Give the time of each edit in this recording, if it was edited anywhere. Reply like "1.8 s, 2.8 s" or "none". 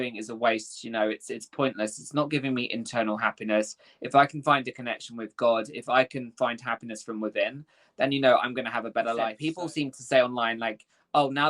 9.4 s